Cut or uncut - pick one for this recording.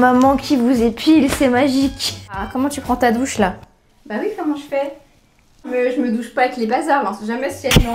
cut